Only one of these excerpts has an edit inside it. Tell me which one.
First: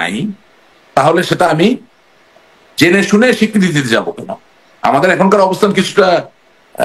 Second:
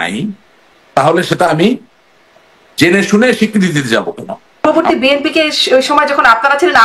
second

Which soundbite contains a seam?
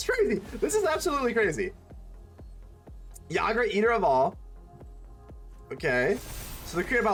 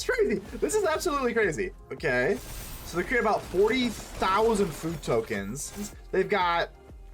second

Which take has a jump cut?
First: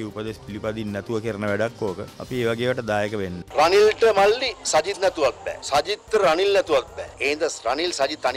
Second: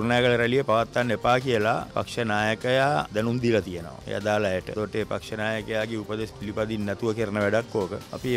first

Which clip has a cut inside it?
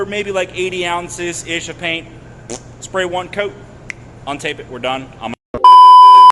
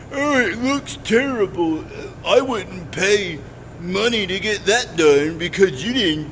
first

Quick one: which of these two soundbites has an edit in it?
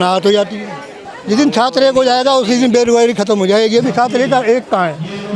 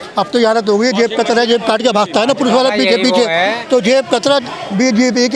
first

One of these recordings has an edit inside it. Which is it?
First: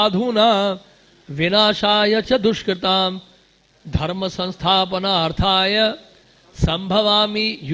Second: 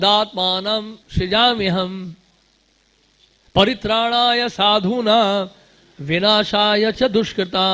second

